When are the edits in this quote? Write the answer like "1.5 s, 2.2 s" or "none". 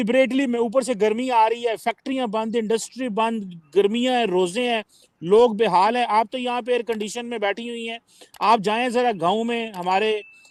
none